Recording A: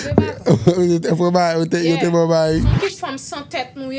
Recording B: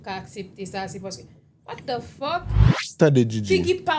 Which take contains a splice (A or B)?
A